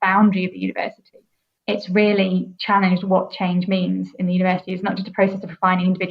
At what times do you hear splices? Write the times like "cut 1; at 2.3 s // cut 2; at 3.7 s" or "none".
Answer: cut 1; at 1.6 s // cut 2; at 2.5 s